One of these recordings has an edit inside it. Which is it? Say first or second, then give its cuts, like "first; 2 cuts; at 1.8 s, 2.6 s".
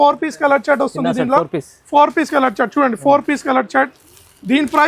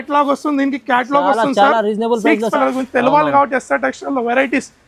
second; 1 cut; at 2.5 s